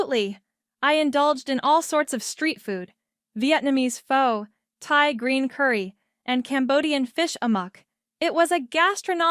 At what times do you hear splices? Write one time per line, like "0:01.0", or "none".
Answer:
none